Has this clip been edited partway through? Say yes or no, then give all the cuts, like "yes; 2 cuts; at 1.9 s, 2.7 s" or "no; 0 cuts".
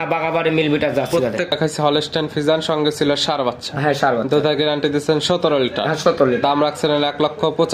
yes; 1 cut; at 1.5 s